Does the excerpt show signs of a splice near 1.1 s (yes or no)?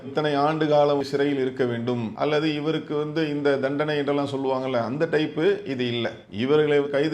yes